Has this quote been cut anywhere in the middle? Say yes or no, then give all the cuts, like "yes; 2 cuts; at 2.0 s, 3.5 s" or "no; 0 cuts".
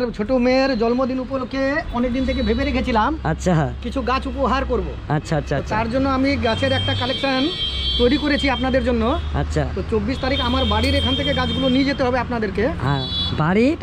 no; 0 cuts